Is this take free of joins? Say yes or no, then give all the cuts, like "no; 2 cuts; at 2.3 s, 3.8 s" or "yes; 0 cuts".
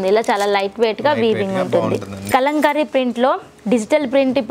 no; 1 cut; at 2.3 s